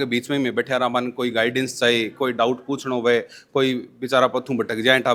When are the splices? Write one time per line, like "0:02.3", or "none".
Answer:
none